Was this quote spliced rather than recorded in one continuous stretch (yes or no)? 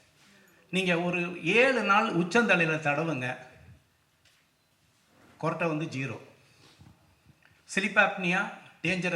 no